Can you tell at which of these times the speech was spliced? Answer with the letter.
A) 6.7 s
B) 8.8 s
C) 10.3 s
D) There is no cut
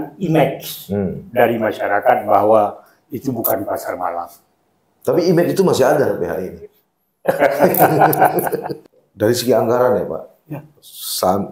B